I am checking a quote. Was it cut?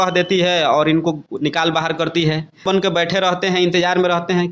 yes; 1 cut; at 2.7 s

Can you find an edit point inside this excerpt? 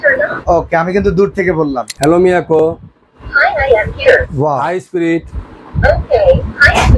yes; 1 cut; at 1.9 s

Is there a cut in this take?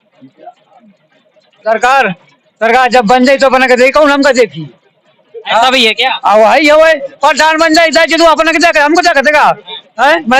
no; 0 cuts

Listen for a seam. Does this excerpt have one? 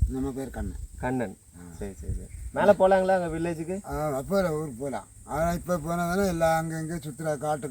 no; 0 cuts

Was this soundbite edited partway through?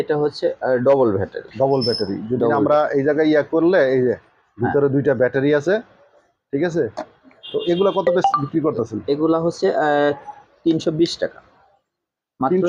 no; 0 cuts

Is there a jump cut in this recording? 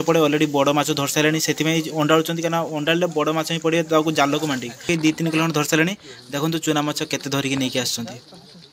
yes; 1 cut; at 4.9 s

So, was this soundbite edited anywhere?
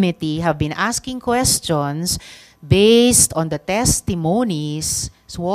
no; 0 cuts

